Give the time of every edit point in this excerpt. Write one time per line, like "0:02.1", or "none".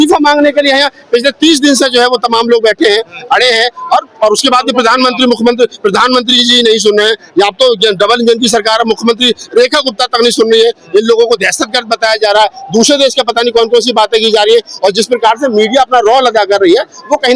none